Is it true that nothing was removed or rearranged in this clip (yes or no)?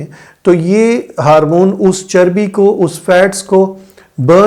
yes